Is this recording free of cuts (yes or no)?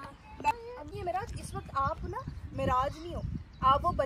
no